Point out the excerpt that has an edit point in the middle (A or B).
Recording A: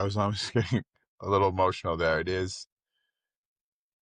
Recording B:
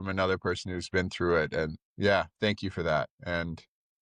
B